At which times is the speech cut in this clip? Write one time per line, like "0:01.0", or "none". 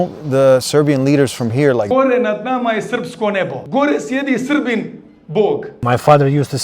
0:01.9
0:05.8